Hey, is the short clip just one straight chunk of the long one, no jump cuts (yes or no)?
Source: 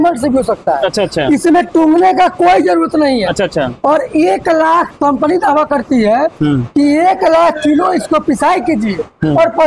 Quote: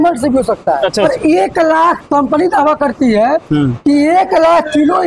no